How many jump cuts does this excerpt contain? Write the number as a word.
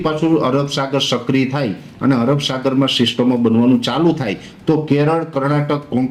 zero